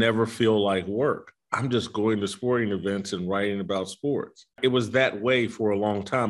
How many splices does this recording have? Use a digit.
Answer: 1